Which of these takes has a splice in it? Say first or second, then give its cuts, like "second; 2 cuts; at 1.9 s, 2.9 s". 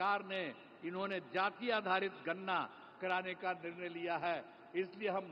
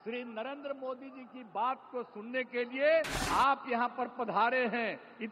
second; 1 cut; at 3.2 s